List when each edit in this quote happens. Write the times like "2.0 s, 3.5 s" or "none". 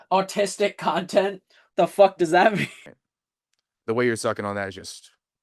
2.9 s